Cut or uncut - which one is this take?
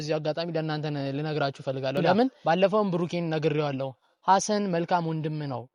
cut